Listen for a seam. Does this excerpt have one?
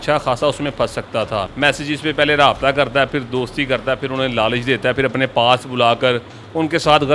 yes; 1 cut; at 1.4 s

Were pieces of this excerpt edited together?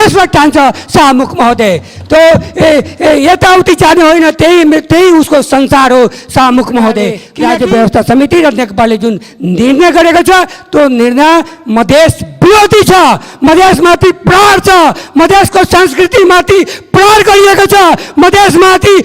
yes; 1 cut; at 7.3 s

